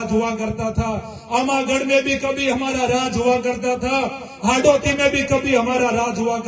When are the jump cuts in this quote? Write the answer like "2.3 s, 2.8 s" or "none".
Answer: none